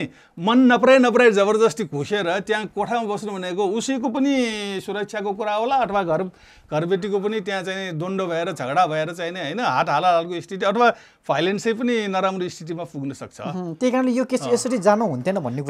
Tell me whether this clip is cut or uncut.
uncut